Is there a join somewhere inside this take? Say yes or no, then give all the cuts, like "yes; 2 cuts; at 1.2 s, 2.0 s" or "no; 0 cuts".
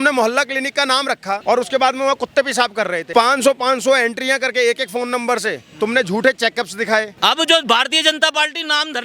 yes; 3 cuts; at 1.4 s, 3.0 s, 7.2 s